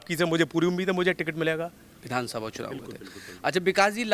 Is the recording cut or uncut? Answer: cut